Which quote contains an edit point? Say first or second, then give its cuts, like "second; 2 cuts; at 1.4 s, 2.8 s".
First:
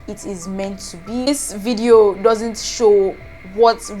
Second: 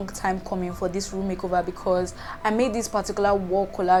first; 1 cut; at 1.3 s